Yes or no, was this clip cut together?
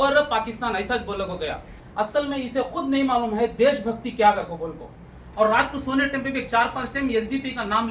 yes